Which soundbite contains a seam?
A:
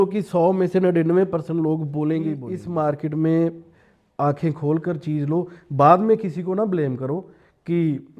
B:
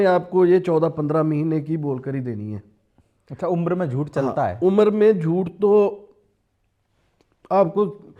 A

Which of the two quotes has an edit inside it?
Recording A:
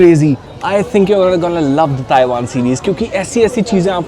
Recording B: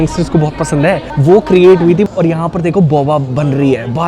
B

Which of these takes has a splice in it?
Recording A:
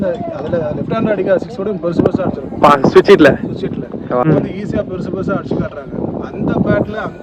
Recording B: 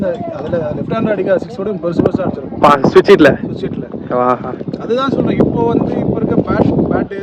A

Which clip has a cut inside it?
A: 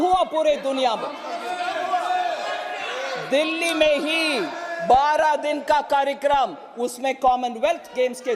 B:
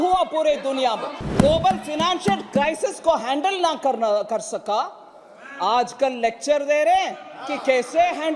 B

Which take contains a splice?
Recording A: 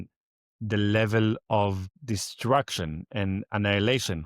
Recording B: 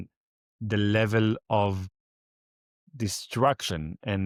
A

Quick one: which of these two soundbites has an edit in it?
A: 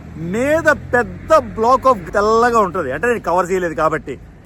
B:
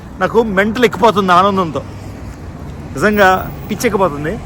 A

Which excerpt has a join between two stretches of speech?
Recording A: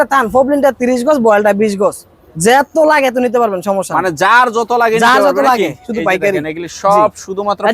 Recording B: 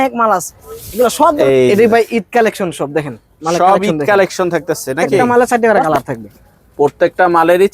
B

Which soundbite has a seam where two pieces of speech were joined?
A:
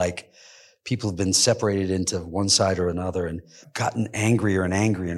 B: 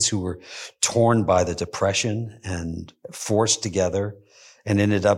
A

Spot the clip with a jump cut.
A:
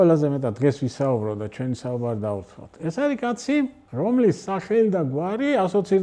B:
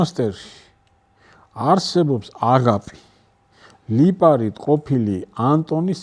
A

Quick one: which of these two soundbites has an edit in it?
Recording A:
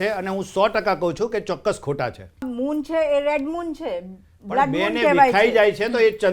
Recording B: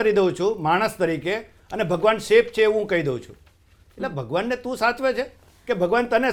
A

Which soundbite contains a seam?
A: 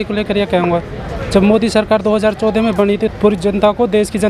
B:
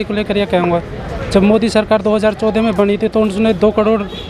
A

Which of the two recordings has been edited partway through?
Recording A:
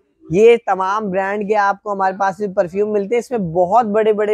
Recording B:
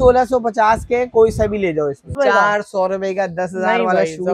B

